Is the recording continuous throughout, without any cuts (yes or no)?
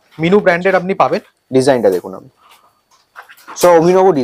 yes